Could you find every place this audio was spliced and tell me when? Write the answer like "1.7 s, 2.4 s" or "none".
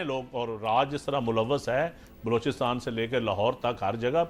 none